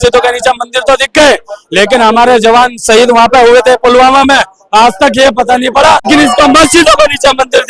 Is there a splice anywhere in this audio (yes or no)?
no